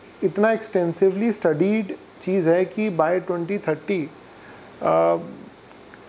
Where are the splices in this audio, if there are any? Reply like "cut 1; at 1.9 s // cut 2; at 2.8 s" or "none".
none